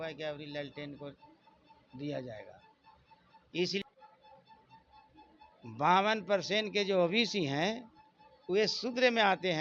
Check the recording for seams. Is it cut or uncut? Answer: cut